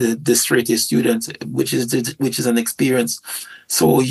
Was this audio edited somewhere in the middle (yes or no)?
no